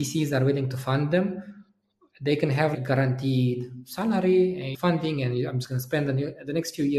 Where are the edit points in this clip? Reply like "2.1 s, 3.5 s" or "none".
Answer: 2.7 s, 4.7 s